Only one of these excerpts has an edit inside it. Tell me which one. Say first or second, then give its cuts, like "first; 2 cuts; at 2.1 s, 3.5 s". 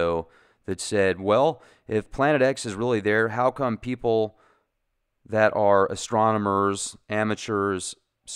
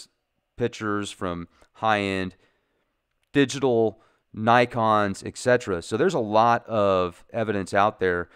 second; 1 cut; at 2.1 s